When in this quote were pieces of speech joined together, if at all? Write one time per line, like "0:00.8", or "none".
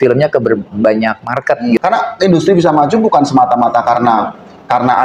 0:01.8